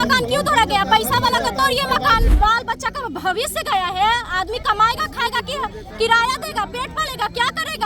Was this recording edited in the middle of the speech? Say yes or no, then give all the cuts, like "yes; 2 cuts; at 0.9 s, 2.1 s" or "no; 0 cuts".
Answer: yes; 1 cut; at 2.2 s